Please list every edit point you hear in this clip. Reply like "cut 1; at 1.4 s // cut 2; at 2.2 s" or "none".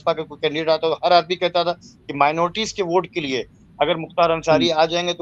none

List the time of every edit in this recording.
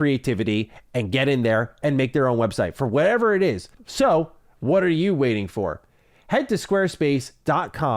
cut 1; at 3.8 s

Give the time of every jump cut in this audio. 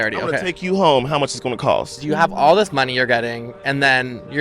cut 1; at 2.0 s

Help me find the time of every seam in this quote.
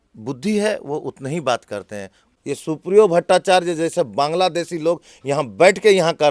cut 1; at 2.2 s

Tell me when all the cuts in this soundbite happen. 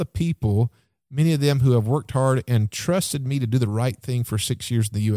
none

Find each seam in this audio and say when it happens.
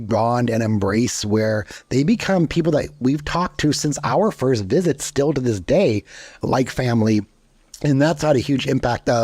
cut 1; at 6.4 s

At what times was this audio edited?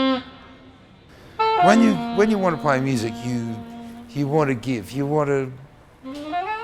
cut 1; at 1.7 s

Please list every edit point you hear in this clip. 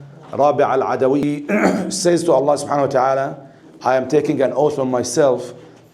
cut 1; at 1.2 s

